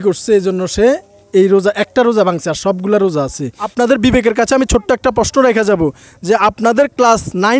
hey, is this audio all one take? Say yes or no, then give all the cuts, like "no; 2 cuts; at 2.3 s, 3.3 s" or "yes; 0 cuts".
no; 1 cut; at 3.6 s